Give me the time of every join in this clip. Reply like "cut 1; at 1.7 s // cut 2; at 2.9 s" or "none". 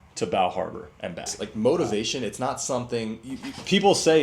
cut 1; at 1.4 s